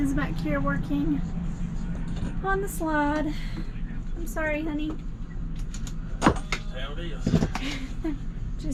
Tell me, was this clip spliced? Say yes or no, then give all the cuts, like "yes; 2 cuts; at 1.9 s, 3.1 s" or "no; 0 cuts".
no; 0 cuts